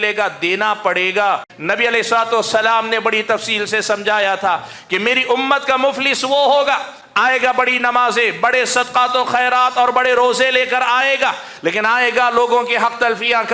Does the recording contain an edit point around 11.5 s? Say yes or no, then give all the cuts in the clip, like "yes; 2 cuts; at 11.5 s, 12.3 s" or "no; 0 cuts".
no; 1 cut; at 1.5 s